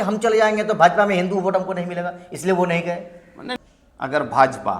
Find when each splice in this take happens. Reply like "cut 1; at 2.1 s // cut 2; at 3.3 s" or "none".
cut 1; at 3.4 s